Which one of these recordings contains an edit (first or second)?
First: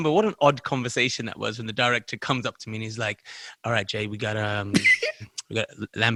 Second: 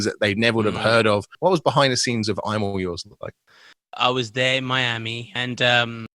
second